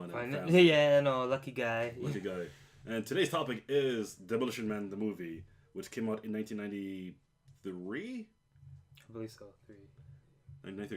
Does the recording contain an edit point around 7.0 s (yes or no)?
yes